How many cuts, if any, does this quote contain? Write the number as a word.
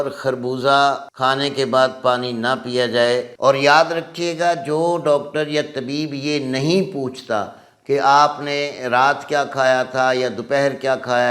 two